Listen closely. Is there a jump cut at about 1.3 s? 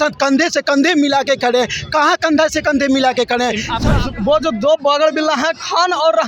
no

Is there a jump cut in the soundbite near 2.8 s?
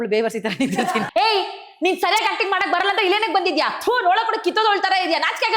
no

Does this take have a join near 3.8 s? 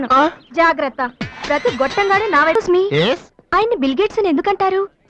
no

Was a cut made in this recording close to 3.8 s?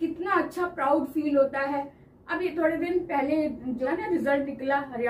yes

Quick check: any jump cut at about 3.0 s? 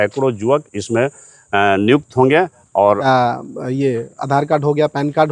yes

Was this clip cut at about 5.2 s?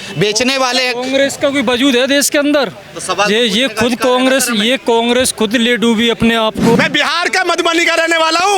no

